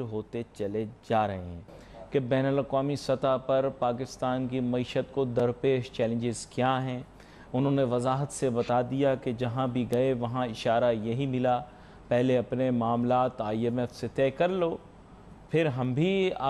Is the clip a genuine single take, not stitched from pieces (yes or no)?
yes